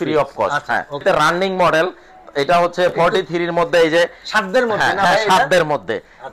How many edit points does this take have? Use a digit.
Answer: 1